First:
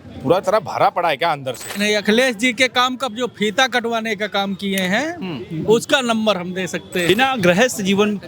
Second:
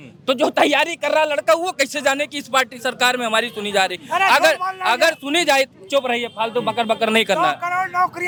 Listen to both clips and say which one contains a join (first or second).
first